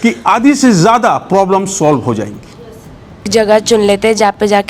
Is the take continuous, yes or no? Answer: no